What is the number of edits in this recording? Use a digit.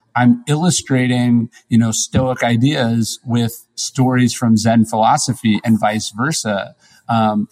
0